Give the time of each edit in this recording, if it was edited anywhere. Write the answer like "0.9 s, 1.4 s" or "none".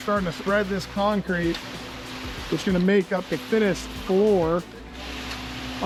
none